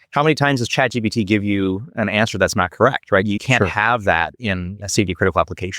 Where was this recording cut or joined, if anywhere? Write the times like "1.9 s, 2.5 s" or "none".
3.4 s, 4.8 s